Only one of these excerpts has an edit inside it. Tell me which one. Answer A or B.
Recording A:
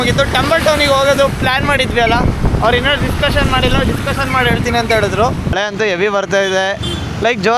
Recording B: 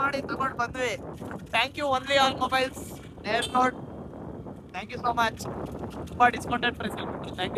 A